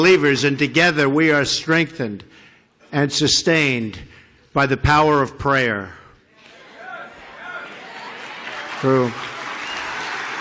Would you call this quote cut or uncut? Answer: uncut